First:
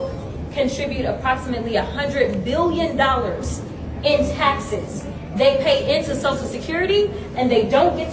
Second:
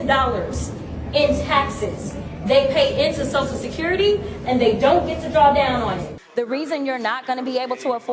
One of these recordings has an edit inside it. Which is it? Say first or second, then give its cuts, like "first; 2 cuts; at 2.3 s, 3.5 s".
second; 1 cut; at 6.1 s